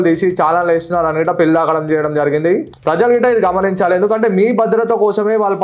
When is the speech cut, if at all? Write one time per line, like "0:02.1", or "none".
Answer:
0:02.7